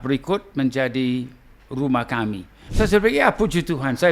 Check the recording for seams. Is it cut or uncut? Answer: cut